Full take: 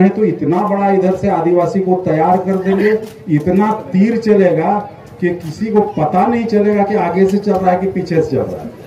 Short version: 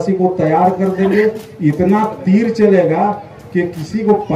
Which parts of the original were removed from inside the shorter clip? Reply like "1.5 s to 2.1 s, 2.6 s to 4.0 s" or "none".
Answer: none